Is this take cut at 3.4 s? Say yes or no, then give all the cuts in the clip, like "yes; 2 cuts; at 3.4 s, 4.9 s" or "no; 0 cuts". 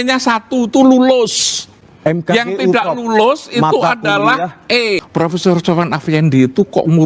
no; 1 cut; at 5.0 s